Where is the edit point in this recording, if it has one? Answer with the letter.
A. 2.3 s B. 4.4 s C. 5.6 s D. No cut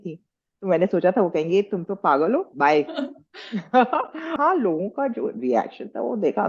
B